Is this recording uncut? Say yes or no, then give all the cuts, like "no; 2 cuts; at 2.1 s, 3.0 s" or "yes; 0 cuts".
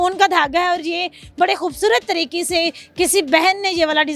yes; 0 cuts